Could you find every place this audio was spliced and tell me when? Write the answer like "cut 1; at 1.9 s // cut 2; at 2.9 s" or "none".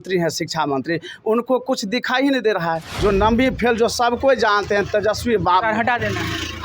cut 1; at 2.9 s